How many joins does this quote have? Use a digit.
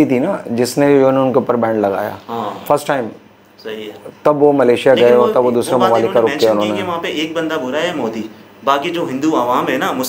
0